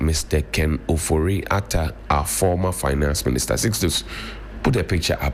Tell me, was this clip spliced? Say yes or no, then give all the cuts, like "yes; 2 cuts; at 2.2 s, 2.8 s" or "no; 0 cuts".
no; 0 cuts